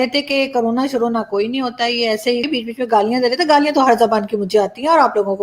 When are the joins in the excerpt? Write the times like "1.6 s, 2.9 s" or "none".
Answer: 2.4 s